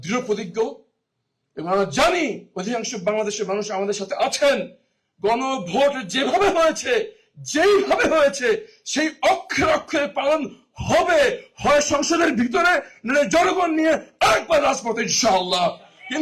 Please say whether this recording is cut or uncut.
uncut